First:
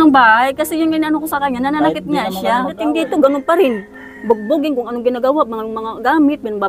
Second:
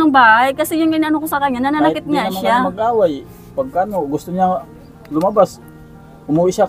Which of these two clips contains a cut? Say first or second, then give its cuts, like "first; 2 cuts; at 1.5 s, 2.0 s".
first; 1 cut; at 2.8 s